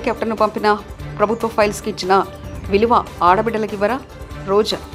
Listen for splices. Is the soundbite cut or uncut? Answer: uncut